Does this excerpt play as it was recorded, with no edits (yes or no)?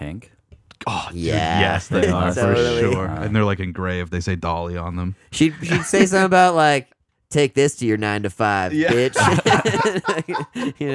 yes